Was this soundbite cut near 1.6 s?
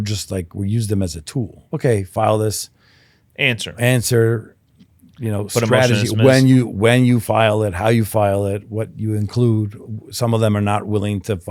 yes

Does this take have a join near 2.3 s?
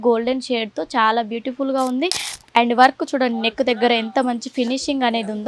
yes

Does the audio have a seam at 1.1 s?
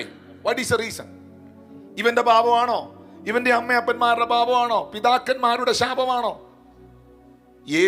no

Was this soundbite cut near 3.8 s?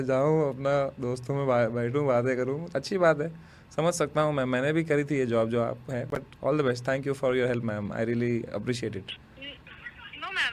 no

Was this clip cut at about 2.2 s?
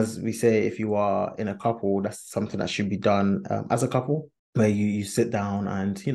no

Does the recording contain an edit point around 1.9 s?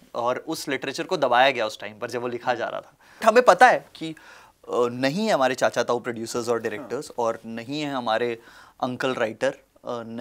no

